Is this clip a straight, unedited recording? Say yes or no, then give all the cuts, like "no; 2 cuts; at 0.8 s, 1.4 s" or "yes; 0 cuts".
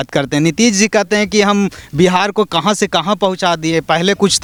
yes; 0 cuts